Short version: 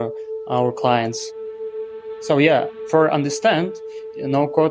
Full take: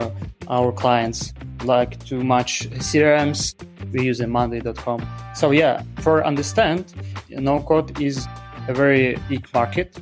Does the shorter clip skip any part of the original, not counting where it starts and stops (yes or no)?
yes